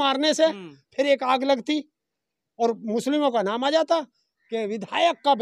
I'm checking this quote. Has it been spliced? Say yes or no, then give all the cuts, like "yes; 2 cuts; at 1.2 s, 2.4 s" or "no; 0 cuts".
no; 0 cuts